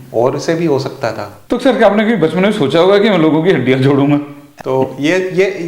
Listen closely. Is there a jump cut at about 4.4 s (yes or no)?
yes